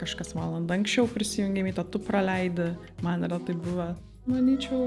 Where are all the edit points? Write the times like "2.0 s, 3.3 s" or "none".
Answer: 4.0 s